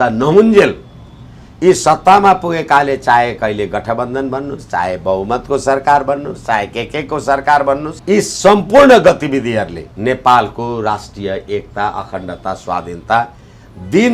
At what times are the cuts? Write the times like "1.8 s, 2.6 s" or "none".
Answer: 7.9 s, 9.8 s